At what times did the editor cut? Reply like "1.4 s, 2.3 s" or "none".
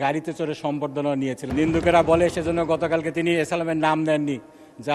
1.4 s